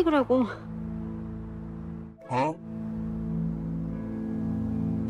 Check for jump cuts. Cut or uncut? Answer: uncut